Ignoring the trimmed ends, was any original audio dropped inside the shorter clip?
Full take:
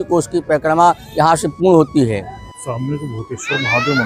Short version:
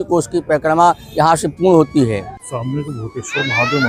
yes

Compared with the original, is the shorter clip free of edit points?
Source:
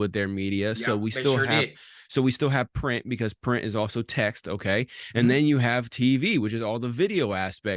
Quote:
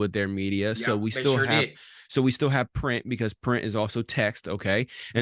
yes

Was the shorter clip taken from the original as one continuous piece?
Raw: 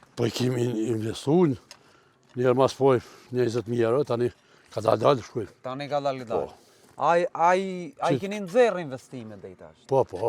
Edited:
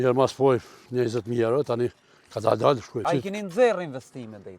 no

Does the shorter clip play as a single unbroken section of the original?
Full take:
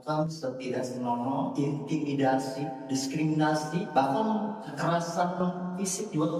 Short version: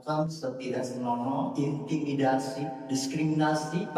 yes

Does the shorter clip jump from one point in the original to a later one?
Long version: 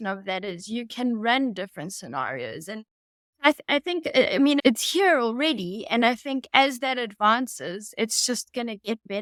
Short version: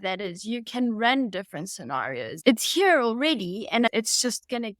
yes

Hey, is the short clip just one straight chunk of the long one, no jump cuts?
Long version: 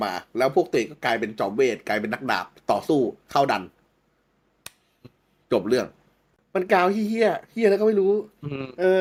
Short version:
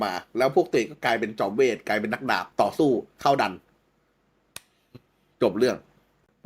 no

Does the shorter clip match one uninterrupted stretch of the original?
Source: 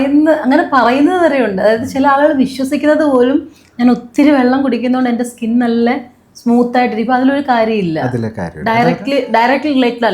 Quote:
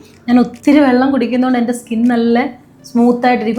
yes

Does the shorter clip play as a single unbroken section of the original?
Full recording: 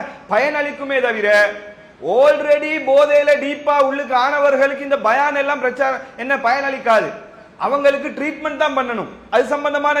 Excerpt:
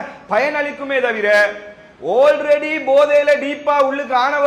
yes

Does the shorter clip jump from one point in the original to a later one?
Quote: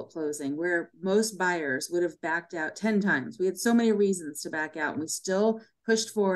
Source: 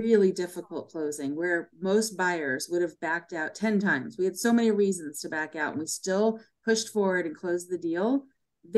no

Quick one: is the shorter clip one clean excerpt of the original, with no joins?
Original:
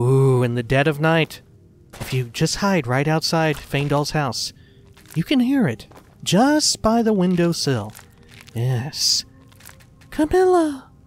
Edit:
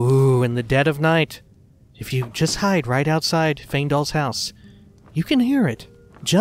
yes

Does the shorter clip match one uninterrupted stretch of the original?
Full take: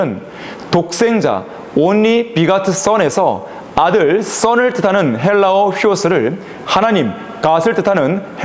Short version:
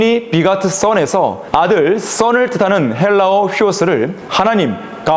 no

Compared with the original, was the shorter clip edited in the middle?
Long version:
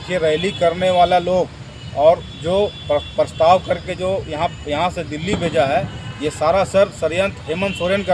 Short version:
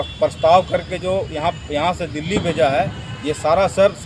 no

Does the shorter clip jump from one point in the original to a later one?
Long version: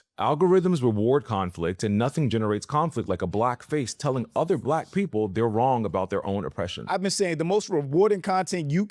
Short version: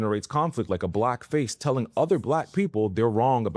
no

